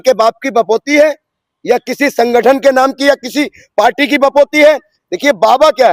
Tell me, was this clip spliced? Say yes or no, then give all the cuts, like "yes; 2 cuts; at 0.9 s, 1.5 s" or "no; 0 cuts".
no; 0 cuts